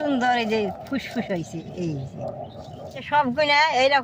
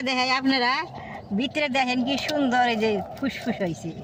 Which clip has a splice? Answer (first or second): first